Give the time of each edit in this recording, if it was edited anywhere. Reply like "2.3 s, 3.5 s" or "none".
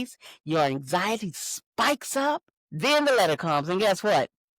2.6 s